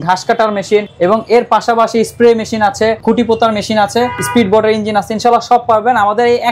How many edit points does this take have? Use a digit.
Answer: 3